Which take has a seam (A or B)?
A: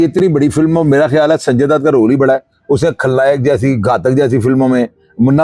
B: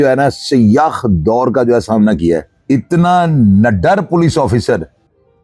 B